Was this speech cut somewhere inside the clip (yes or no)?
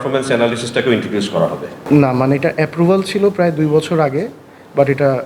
yes